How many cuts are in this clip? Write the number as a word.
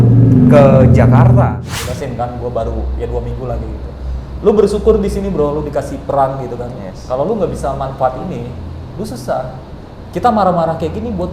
one